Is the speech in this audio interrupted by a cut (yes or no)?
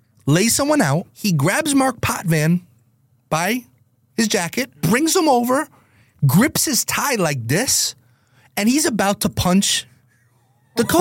yes